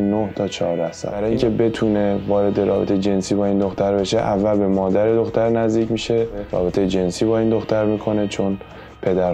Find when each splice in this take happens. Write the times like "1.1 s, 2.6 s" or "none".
1.1 s, 6.5 s